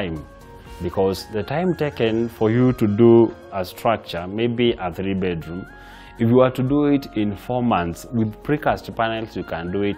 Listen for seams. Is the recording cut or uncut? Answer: cut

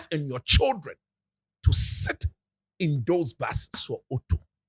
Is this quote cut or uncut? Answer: cut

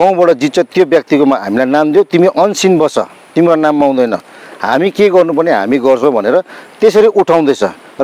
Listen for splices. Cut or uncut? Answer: uncut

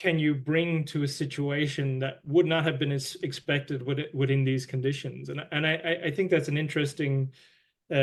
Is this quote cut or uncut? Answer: uncut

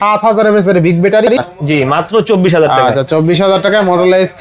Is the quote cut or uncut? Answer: cut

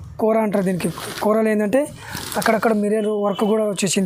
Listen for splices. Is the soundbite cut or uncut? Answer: uncut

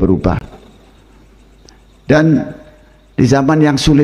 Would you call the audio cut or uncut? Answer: uncut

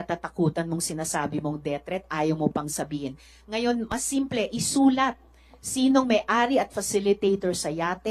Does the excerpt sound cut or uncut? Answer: uncut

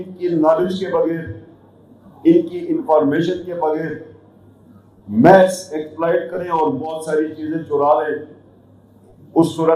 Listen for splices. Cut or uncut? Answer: uncut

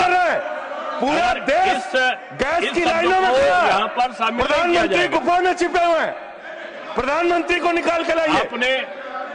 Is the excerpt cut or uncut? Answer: uncut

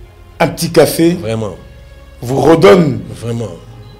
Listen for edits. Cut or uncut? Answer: uncut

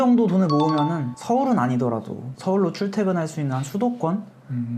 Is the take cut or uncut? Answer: uncut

